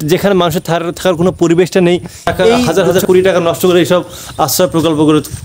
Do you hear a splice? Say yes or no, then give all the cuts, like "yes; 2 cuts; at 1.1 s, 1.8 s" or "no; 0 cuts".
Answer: yes; 1 cut; at 2.7 s